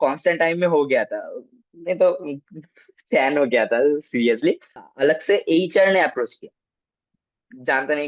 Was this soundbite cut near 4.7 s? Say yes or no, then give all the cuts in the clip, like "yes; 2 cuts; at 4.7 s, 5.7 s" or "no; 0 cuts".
yes; 1 cut; at 4.7 s